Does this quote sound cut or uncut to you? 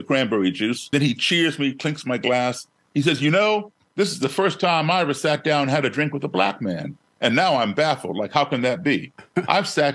cut